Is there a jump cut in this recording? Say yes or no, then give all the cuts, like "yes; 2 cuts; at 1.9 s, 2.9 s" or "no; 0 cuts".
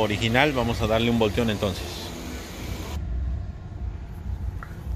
no; 0 cuts